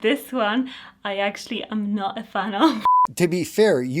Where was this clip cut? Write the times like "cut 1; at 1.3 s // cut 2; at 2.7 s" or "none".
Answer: cut 1; at 2.9 s